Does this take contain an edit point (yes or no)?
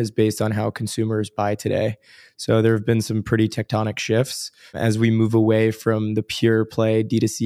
yes